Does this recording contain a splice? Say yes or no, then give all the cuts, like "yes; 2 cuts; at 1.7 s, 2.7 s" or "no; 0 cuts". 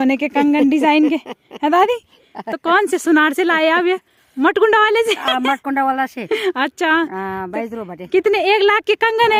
no; 0 cuts